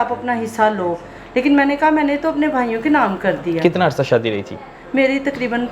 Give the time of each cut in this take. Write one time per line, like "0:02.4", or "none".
none